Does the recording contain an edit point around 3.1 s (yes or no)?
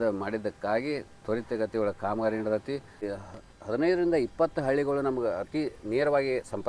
yes